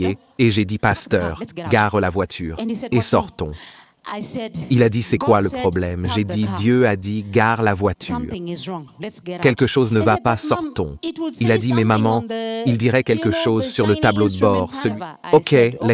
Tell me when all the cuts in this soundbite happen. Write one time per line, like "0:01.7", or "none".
0:14.9

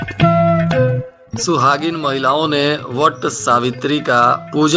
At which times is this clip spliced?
0:01.2

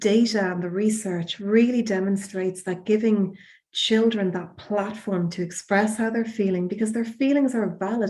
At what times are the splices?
none

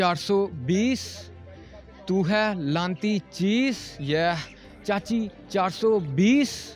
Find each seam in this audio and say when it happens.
none

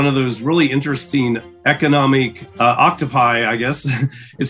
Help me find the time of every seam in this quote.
0:01.4
0:02.4

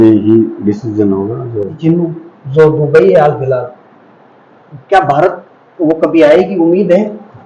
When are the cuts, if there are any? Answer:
0:01.7

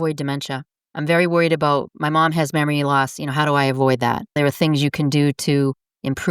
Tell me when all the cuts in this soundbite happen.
0:04.3

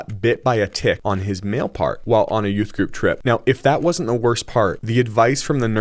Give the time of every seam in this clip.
0:01.0
0:02.0
0:03.2
0:04.8

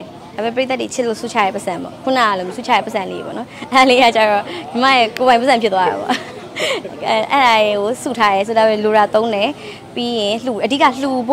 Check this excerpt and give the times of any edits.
none

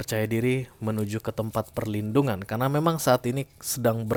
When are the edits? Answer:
none

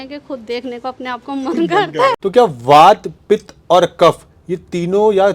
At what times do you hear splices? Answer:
0:02.2

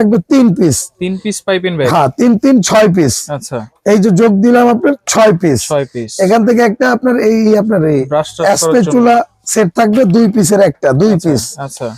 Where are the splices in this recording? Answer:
none

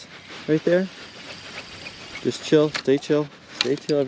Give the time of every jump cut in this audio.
none

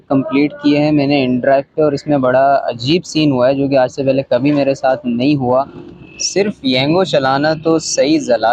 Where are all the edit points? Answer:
0:05.8

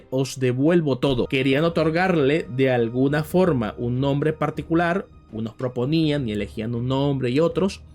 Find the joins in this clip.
0:01.3

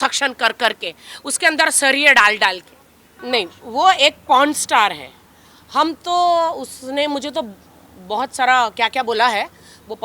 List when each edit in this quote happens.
0:03.1

